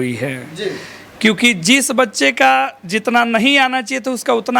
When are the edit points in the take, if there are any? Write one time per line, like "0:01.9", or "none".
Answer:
none